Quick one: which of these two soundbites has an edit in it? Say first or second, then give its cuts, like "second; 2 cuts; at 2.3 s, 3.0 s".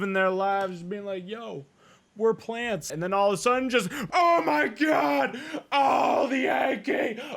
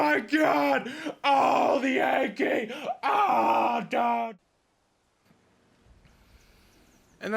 first; 1 cut; at 2.9 s